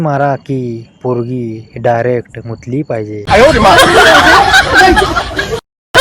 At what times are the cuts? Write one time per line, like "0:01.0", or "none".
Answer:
0:03.0